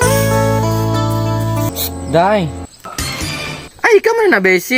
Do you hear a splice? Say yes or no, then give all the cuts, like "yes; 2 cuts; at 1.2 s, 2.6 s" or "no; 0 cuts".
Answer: yes; 1 cut; at 1.7 s